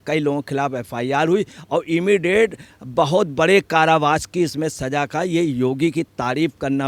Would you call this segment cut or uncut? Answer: uncut